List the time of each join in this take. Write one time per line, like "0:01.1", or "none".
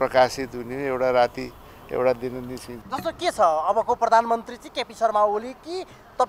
0:02.7